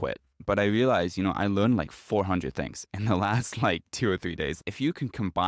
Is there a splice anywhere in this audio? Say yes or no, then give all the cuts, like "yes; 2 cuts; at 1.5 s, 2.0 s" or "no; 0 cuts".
yes; 1 cut; at 4.5 s